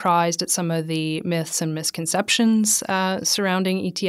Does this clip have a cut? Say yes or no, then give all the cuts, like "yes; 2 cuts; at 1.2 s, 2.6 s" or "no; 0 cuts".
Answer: no; 0 cuts